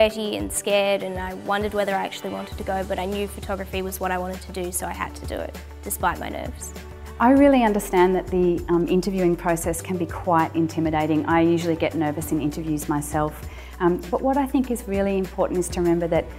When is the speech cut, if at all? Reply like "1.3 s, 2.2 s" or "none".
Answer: 3.6 s